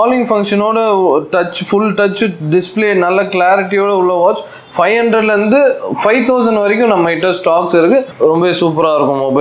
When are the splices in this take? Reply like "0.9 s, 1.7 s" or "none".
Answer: 8.1 s